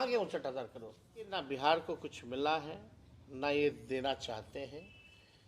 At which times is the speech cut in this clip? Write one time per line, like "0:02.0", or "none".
0:01.4